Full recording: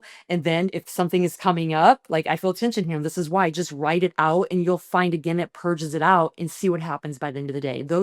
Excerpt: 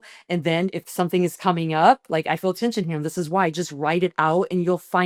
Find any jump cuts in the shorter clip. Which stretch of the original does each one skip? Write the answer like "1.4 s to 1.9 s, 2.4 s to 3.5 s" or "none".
none